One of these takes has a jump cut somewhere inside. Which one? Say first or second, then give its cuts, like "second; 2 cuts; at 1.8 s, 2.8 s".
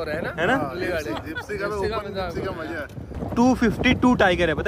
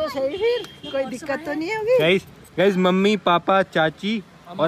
first; 1 cut; at 3.0 s